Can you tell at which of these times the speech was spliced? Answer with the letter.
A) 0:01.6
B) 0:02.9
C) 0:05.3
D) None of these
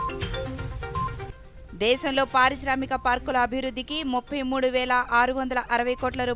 A